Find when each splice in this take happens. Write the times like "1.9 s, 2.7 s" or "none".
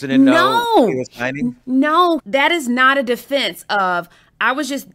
2.2 s